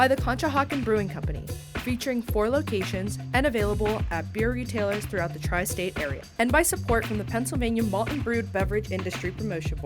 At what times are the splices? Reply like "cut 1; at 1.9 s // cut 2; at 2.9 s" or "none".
cut 1; at 6.2 s